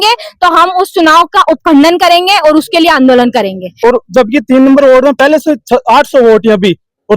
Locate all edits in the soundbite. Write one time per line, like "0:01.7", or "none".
0:03.6

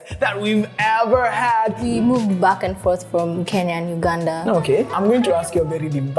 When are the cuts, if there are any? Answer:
0:01.8
0:04.9

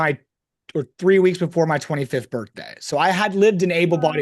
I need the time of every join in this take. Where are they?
none

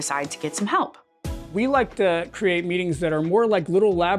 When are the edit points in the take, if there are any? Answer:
0:01.4

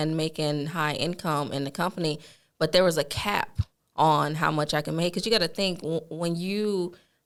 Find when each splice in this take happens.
none

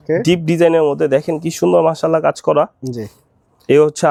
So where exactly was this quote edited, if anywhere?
none

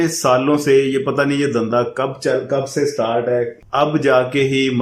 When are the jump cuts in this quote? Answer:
0:03.6

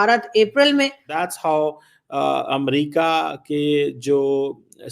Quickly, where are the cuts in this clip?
0:01.2

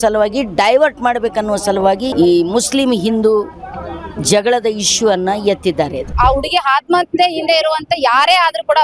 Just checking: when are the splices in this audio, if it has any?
0:06.0

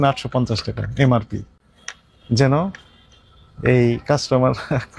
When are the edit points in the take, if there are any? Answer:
none

